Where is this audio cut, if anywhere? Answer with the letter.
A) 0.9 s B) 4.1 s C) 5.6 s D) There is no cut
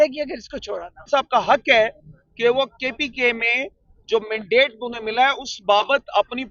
D